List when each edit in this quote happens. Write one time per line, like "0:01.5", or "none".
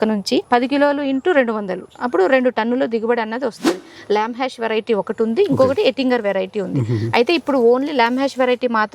0:03.9